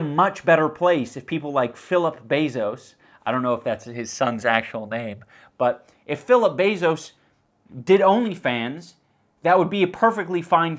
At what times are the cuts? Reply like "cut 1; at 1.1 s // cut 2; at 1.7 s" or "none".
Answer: none